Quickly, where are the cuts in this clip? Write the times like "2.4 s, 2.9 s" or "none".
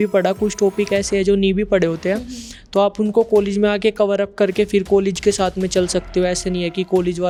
none